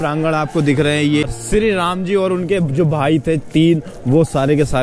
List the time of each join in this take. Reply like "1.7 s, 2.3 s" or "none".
1.2 s